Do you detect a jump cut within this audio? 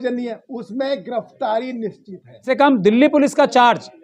yes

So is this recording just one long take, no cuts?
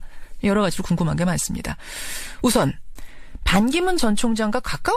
yes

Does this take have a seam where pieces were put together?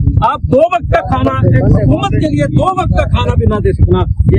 no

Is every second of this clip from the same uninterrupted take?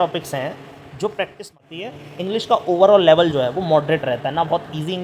no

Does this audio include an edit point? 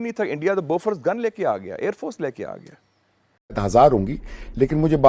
yes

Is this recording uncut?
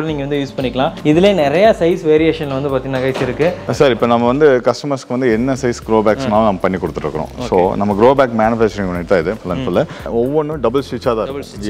no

